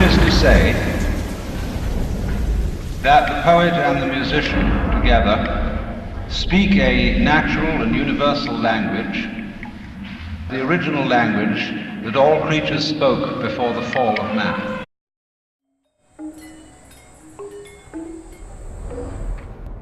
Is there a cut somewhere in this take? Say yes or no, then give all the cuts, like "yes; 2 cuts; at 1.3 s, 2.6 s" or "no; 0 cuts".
no; 0 cuts